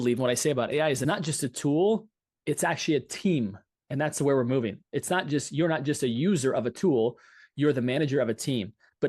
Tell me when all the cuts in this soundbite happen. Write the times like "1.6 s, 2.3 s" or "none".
1.0 s